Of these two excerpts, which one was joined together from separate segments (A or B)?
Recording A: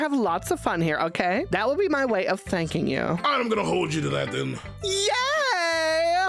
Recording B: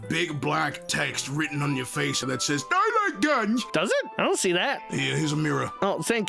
B